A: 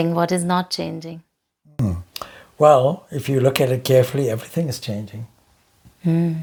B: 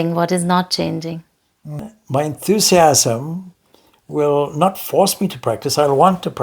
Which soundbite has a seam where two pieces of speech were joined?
B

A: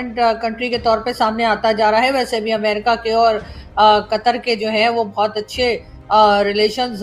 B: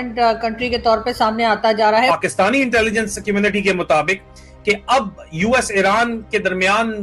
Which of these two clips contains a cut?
B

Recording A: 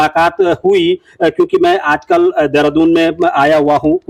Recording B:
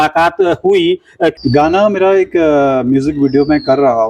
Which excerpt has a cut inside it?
B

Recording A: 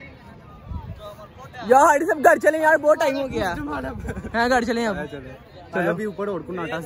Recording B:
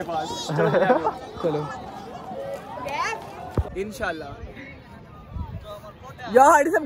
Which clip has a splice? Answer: B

